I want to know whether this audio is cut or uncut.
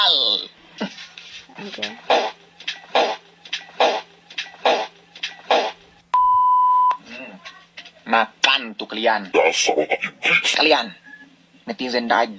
uncut